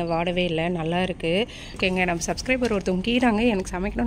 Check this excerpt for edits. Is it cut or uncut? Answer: cut